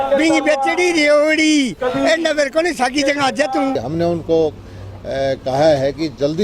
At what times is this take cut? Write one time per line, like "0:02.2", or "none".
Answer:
0:03.8